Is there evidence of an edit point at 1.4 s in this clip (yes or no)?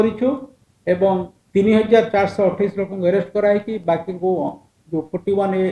yes